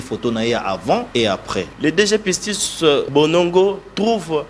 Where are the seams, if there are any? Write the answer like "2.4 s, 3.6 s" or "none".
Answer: 1.5 s, 3.1 s